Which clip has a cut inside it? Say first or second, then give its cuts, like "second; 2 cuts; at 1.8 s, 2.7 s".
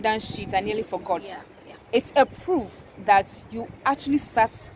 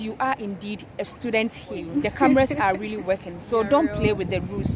second; 1 cut; at 1.8 s